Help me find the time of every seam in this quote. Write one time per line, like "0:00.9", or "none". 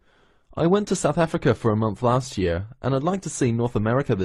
none